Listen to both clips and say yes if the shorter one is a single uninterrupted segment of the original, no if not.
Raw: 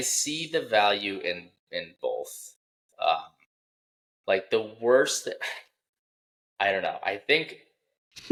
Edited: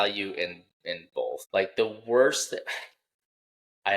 no